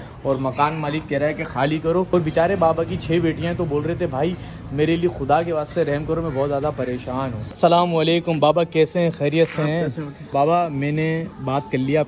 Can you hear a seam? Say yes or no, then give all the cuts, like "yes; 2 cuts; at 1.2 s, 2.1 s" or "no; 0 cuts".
yes; 3 cuts; at 2.1 s, 7.5 s, 10.3 s